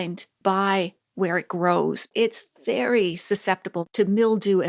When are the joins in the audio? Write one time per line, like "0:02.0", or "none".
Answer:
0:02.1
0:03.7